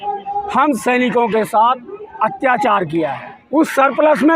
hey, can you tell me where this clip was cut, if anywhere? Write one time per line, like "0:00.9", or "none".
0:03.3